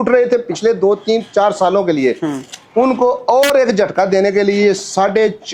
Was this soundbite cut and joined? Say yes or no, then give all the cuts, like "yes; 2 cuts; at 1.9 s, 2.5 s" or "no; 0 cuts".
no; 0 cuts